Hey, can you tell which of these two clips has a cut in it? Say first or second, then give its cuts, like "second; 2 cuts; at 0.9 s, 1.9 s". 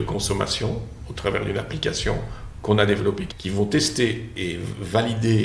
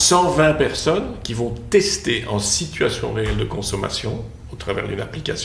first; 2 cuts; at 3.3 s, 4.3 s